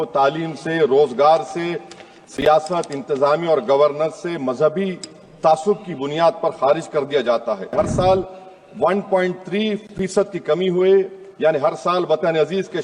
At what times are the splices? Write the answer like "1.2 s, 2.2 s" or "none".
7.7 s